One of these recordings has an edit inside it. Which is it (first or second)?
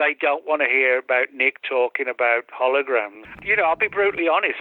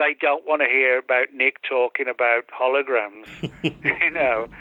first